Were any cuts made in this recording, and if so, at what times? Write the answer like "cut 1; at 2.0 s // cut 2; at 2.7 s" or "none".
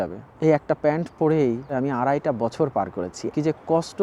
cut 1; at 1.7 s // cut 2; at 3.3 s

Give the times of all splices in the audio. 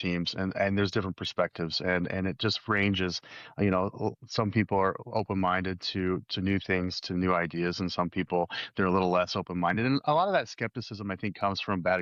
none

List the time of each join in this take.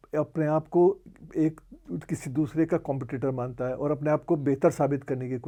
none

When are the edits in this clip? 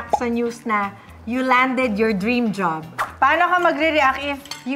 cut 1; at 3.0 s

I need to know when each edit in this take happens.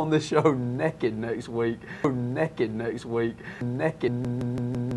cut 1; at 1.9 s

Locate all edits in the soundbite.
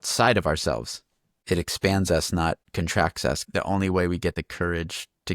cut 1; at 2.6 s // cut 2; at 3.4 s // cut 3; at 4.4 s

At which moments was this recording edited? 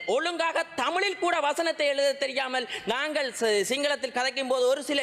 none

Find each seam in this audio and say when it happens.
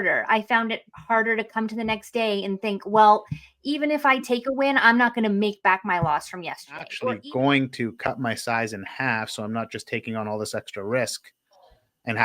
cut 1; at 7.0 s

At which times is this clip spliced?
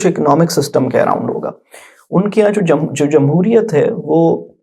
none

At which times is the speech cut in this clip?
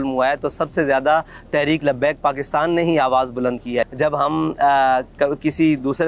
cut 1; at 3.9 s

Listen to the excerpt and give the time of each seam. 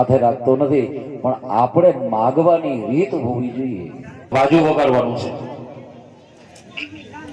cut 1; at 4.3 s

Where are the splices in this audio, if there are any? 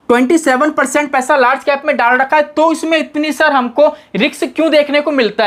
none

